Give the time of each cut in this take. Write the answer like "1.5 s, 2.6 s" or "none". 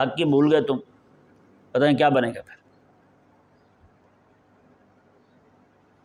none

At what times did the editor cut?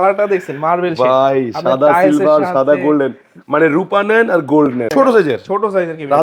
4.9 s

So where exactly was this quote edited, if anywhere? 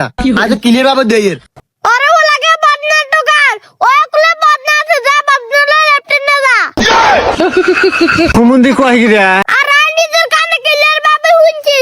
1.6 s, 9.5 s

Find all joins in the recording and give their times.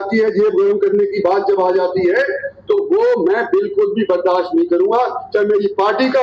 none

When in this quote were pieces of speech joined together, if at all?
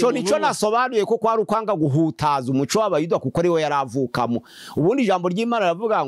none

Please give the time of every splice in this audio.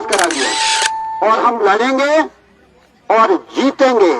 1.0 s

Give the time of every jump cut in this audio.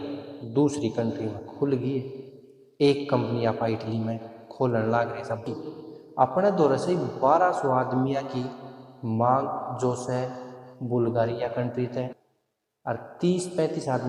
5.4 s, 12.1 s

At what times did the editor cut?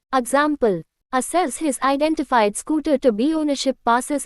0.9 s

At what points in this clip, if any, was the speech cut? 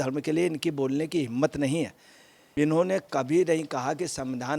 2.4 s

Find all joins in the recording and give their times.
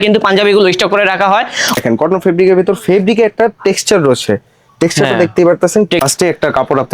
1.7 s, 6.0 s

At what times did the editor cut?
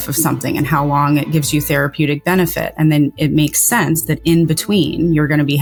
none

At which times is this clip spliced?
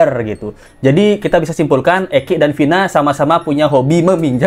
none

